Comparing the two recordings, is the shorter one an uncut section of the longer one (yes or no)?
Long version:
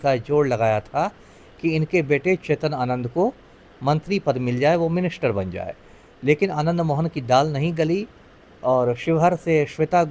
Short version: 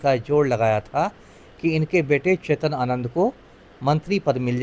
yes